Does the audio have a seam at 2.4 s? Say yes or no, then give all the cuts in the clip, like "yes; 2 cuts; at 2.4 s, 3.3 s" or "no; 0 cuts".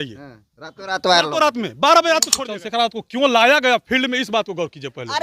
yes; 1 cut; at 2.4 s